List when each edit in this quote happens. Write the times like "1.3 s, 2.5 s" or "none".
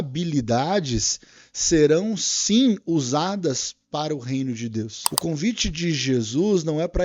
5.0 s